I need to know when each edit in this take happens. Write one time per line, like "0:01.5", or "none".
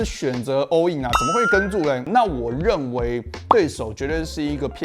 0:02.1

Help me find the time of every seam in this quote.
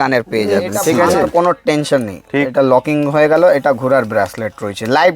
0:01.2

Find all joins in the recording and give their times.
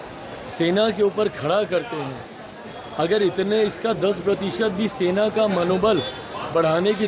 none

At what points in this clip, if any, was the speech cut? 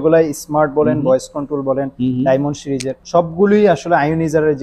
0:02.9

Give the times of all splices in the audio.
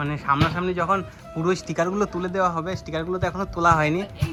none

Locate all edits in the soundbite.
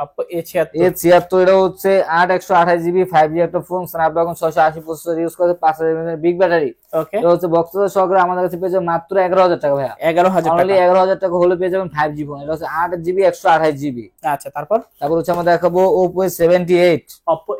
none

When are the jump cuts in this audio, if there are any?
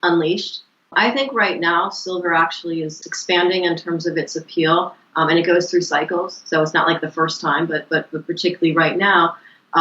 0:00.9

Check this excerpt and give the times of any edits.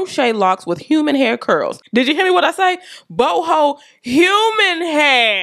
0:01.8

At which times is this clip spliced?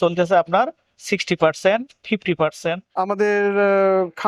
0:02.9

